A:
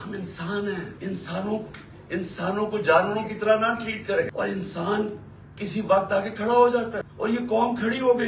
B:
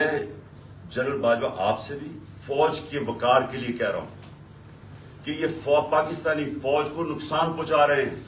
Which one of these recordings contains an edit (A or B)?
A